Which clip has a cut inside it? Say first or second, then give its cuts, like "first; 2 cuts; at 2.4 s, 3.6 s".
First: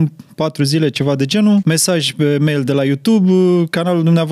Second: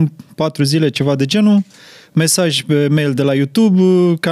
first; 1 cut; at 1.6 s